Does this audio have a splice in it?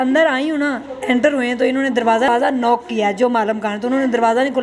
yes; 1 cut; at 2.3 s

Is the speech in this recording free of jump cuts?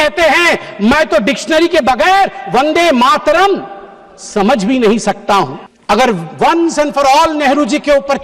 no; 1 cut; at 5.7 s

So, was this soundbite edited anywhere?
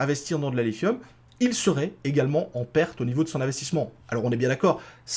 no; 0 cuts

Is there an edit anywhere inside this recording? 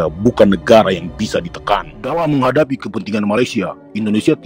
yes; 1 cut; at 2.0 s

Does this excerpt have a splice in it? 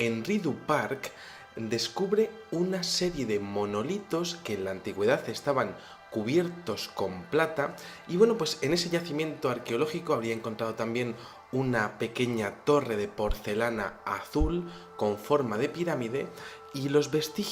no; 0 cuts

